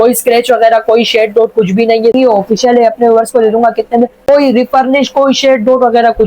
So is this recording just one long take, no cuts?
no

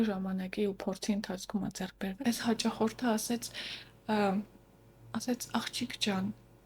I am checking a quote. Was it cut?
yes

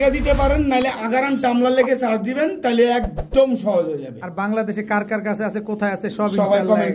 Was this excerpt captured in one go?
yes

